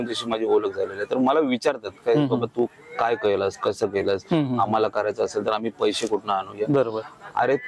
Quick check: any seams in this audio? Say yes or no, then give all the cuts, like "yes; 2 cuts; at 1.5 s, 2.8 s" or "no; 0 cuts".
no; 0 cuts